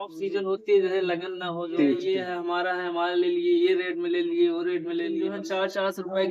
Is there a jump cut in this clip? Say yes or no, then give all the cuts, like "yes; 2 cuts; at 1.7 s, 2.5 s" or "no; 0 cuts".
yes; 2 cuts; at 2.1 s, 5.3 s